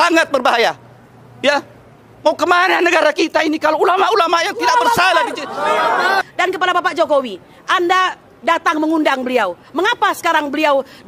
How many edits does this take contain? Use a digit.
1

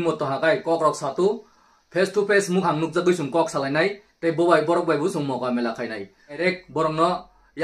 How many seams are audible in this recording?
1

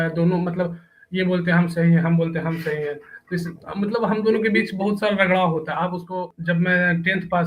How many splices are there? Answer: 1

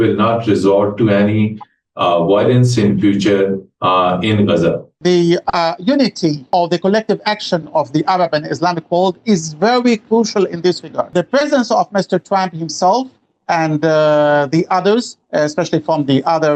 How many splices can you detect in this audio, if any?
3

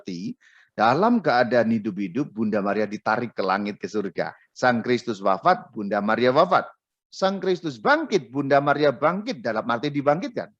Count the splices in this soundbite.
1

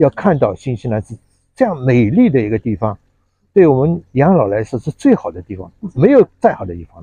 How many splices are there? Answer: 0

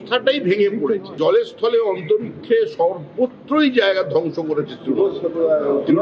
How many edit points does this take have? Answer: 1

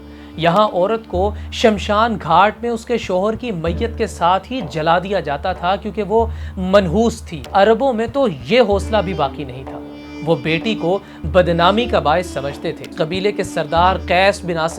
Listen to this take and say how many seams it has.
2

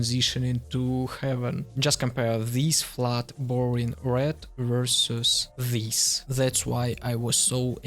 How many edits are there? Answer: 2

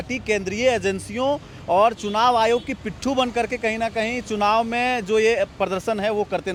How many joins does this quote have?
0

